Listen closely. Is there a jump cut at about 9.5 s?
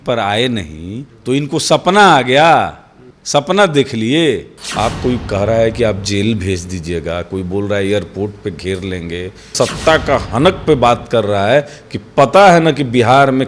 yes; 2 cuts; at 4.5 s, 9.5 s

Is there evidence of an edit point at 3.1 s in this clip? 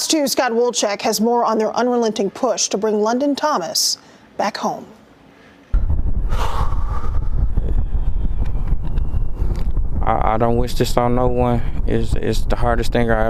no; 0 cuts

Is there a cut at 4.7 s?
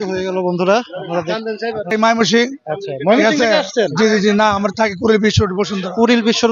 no; 1 cut; at 1.9 s

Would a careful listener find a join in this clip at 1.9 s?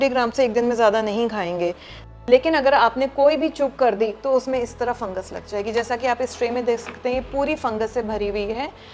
yes; 1 cut; at 1.9 s

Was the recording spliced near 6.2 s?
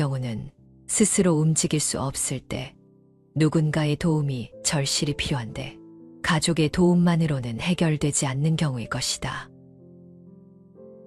no; 1 cut; at 9.5 s

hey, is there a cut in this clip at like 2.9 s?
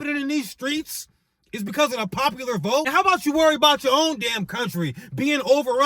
yes; 1 cut; at 2.9 s

